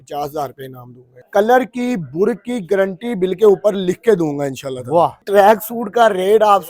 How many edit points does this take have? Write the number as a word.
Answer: two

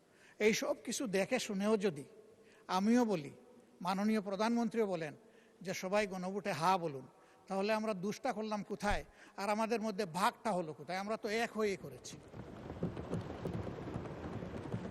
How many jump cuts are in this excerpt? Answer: zero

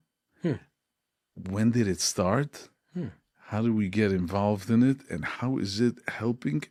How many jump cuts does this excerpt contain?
zero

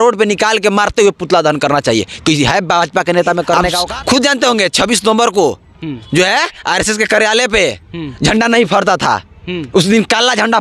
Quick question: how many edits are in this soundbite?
one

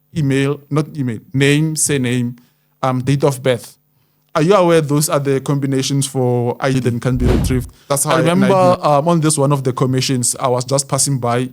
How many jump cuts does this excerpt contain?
one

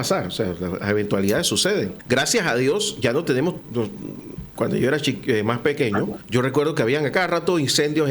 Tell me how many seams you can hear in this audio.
three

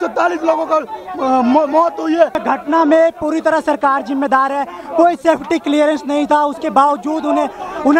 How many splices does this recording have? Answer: one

